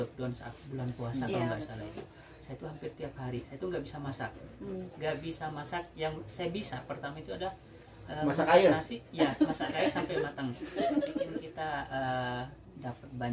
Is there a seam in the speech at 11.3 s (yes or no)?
yes